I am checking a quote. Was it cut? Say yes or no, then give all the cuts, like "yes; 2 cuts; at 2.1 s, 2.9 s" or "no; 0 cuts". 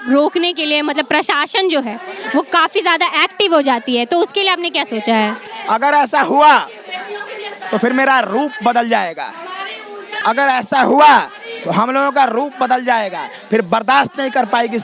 yes; 2 cuts; at 5.5 s, 10.1 s